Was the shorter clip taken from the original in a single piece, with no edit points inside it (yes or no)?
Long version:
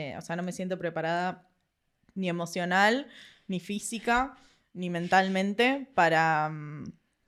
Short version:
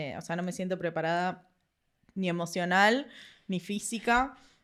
yes